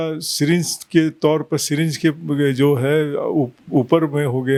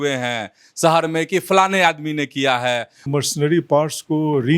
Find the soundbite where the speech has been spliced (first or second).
second